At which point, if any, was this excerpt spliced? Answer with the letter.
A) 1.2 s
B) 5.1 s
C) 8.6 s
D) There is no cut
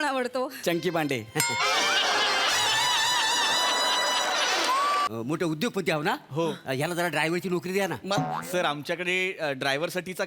B